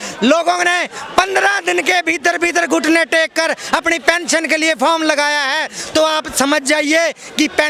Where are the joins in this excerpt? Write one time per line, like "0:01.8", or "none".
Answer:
none